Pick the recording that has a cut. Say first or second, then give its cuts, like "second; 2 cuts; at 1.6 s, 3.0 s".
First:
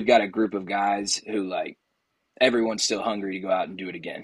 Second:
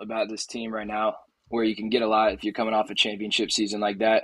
second; 1 cut; at 1.3 s